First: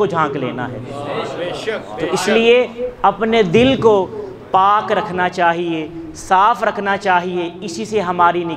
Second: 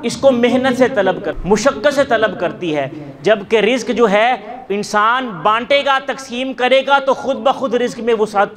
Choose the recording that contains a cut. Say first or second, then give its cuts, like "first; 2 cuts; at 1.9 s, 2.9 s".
second; 1 cut; at 1.3 s